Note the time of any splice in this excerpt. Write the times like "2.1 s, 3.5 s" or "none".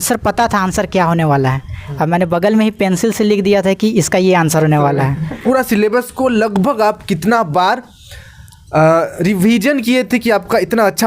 5.4 s